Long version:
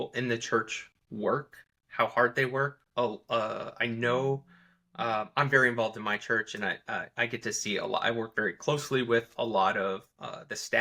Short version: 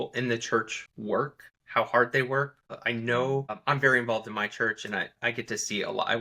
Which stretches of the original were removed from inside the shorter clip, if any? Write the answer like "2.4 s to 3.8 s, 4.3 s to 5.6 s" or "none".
1.1 s to 1.4 s, 2.9 s to 3.6 s, 4.5 s to 5.3 s, 6.8 s to 7.1 s